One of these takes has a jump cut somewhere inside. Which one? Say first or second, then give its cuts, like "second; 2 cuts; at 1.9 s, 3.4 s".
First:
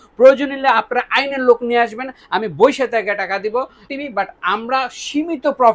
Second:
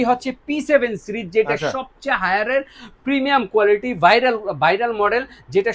first; 1 cut; at 3.9 s